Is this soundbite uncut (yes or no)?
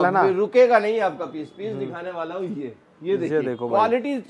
yes